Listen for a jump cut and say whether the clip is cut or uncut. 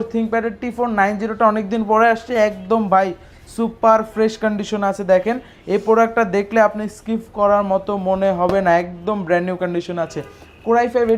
uncut